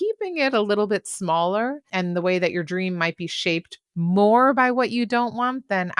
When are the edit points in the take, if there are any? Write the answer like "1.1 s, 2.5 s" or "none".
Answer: 1.8 s